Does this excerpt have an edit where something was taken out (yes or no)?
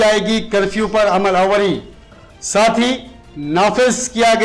no